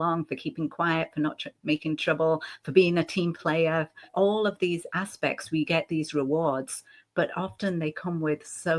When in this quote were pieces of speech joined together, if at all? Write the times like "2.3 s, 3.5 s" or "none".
4.1 s